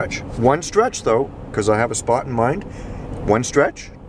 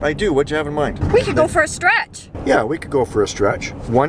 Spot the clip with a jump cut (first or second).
second